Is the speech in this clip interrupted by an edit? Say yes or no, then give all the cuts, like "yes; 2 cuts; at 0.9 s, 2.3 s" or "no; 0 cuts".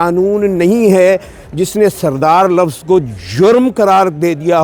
no; 0 cuts